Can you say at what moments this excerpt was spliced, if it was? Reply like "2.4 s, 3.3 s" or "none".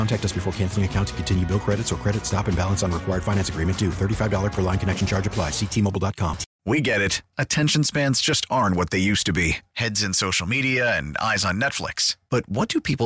6.5 s